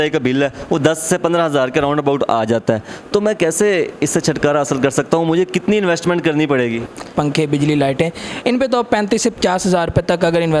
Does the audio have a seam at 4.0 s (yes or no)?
no